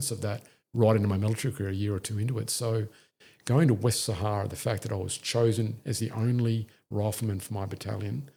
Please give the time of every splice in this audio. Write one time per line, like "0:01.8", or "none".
none